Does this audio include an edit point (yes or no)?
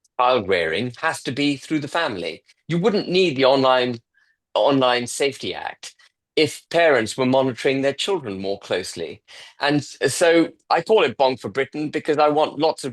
no